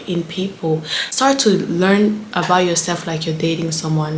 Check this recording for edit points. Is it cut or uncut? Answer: cut